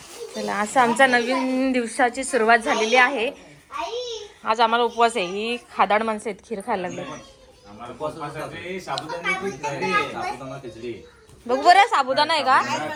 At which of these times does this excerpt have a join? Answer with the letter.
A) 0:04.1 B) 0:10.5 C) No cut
C